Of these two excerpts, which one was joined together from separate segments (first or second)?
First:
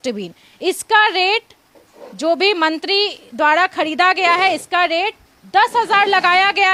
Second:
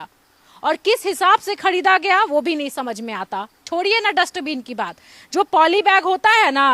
second